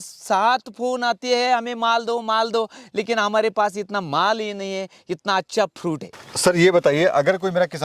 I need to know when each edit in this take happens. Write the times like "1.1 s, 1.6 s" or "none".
none